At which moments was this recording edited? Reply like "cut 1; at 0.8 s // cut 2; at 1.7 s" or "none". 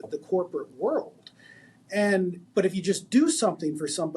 cut 1; at 2.4 s